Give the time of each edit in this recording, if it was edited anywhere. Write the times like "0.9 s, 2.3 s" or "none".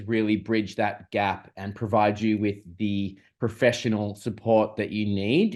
none